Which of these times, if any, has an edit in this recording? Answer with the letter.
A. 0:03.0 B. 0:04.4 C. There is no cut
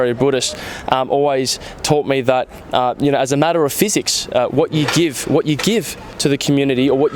C